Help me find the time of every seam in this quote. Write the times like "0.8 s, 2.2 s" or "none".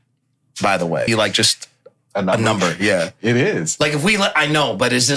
1.1 s